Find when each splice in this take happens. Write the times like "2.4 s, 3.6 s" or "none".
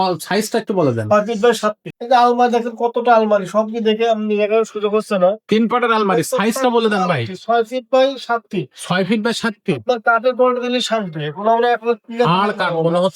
1.9 s